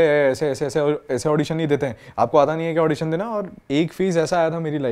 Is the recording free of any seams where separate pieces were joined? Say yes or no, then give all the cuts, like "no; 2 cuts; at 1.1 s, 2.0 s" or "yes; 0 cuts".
no; 1 cut; at 3.5 s